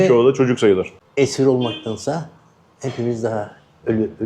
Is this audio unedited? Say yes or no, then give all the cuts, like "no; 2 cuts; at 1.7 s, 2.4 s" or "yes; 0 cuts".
no; 1 cut; at 1.0 s